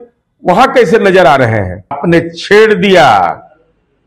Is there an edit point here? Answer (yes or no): yes